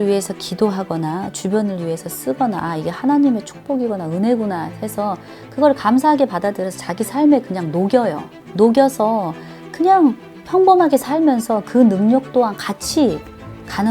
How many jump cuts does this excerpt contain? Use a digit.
0